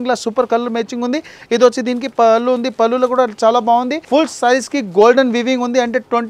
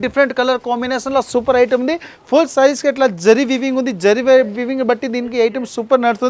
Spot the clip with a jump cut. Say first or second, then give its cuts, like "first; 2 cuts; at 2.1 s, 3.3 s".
first; 1 cut; at 4.0 s